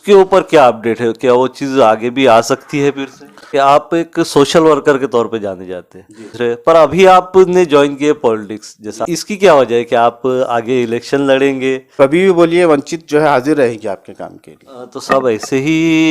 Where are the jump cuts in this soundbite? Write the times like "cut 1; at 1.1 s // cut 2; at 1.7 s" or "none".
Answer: cut 1; at 3.4 s // cut 2; at 6.3 s // cut 3; at 9.0 s // cut 4; at 11.9 s

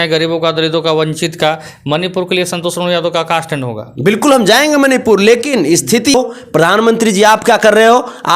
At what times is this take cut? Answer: cut 1; at 6.1 s

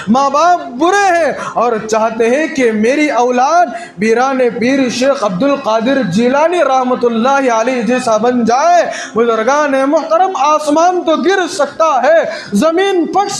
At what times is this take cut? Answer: none

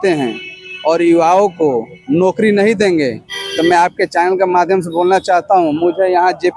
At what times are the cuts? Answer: none

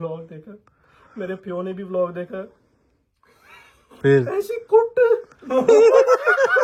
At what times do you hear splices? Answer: none

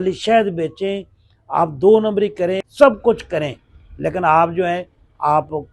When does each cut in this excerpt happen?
cut 1; at 2.7 s

